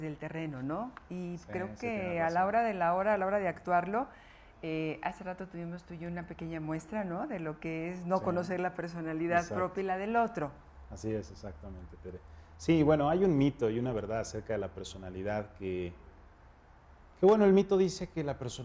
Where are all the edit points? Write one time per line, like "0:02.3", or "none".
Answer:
0:10.0